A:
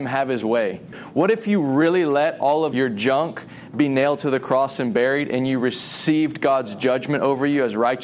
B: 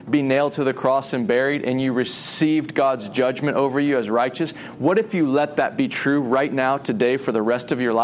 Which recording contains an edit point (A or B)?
A